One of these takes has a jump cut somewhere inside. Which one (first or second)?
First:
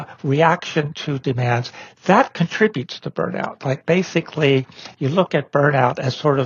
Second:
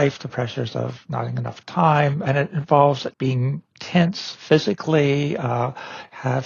second